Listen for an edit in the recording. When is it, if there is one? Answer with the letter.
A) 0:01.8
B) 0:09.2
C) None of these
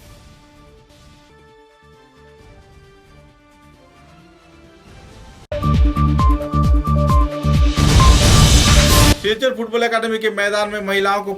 B